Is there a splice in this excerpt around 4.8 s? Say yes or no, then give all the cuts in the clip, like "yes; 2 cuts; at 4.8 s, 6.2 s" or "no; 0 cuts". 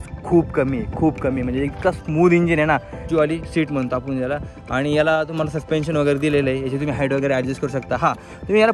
no; 1 cut; at 3.0 s